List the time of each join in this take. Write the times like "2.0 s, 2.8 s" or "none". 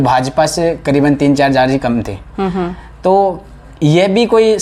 none